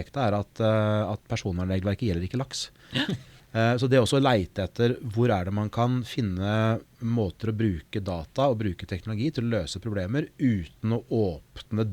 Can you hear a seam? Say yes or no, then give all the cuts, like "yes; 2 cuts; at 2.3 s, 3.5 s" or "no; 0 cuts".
yes; 1 cut; at 3.3 s